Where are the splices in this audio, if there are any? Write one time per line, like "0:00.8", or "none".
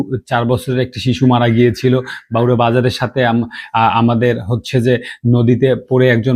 none